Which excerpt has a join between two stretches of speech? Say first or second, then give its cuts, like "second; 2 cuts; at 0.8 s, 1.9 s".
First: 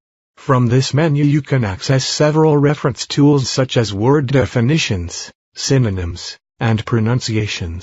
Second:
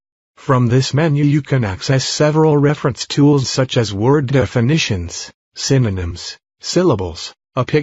first; 1 cut; at 6.7 s